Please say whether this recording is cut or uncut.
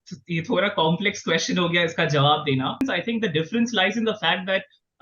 cut